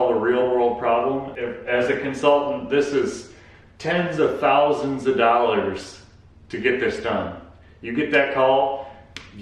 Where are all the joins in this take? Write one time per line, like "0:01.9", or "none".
0:01.3

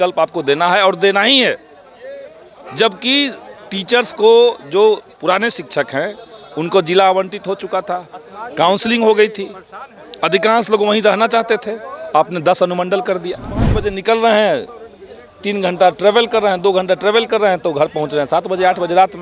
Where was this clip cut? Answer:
0:13.8

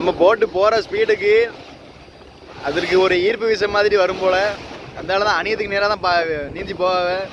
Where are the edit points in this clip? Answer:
none

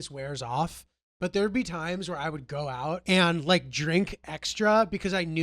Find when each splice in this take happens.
0:03.0

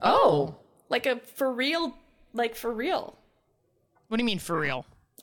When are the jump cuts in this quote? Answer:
none

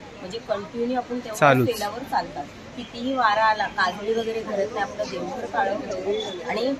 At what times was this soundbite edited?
none

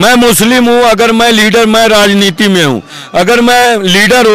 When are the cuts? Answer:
none

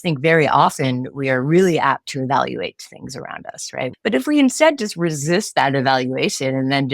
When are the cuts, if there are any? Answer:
0:03.9

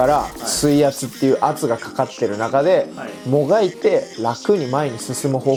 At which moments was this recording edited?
none

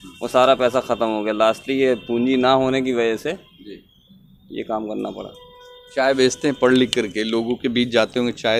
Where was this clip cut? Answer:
none

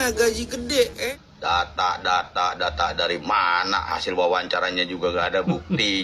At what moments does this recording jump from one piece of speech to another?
0:01.1

